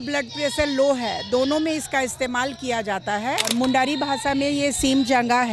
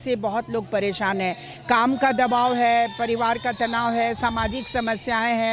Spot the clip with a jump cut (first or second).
first